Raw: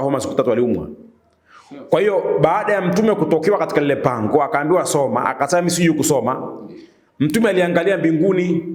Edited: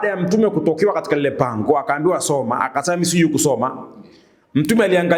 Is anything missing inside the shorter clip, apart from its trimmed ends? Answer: no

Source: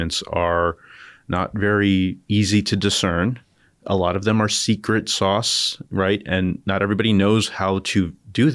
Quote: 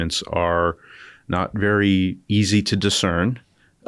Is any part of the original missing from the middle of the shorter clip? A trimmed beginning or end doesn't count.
no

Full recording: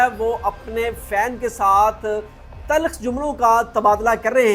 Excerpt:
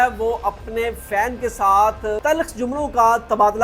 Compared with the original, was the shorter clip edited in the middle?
yes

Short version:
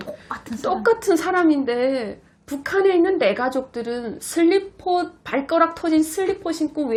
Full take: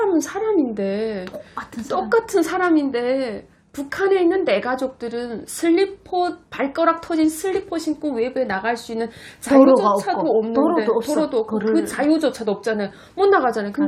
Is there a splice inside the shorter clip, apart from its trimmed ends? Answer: no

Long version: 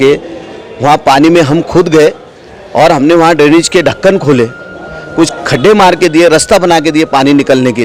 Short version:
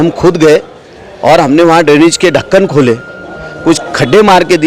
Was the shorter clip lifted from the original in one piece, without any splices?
yes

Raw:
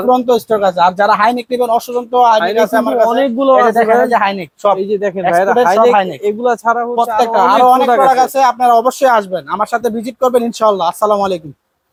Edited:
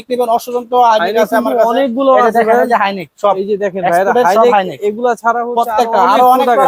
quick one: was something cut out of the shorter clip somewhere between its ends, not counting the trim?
no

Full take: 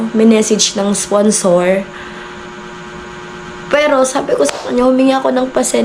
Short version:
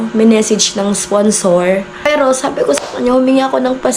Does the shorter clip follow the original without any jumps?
no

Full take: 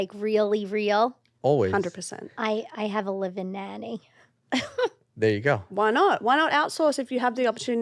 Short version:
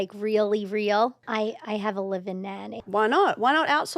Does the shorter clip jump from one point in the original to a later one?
yes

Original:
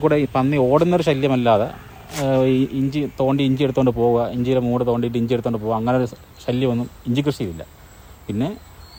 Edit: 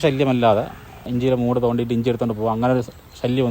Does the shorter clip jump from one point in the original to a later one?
yes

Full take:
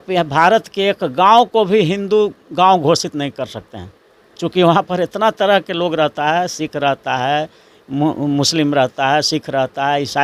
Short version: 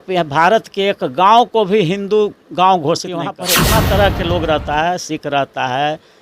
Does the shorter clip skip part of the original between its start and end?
yes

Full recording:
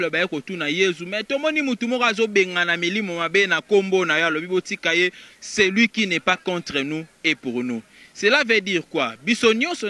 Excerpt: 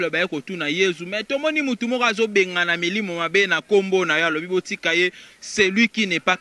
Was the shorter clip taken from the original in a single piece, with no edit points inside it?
yes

